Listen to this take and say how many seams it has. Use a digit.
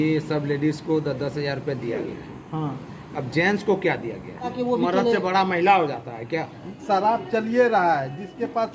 2